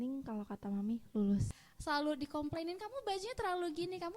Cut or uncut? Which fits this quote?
cut